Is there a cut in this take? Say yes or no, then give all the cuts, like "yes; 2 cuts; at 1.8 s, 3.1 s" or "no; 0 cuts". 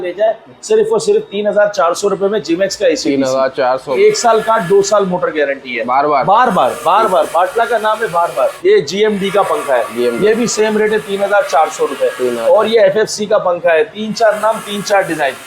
yes; 3 cuts; at 3.9 s, 5.8 s, 8.6 s